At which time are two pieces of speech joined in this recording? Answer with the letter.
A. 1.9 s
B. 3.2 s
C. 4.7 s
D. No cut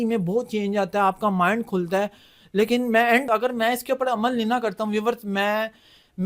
B